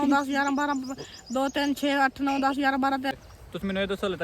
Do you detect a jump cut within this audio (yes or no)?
yes